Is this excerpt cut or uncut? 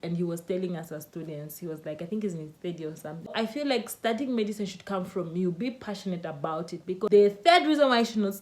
cut